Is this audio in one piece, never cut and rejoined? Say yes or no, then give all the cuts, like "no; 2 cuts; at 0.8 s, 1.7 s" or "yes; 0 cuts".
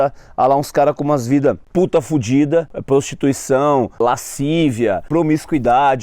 no; 4 cuts; at 1.6 s, 2.8 s, 4.0 s, 5.0 s